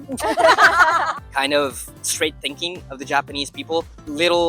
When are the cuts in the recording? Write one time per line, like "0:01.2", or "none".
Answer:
0:01.2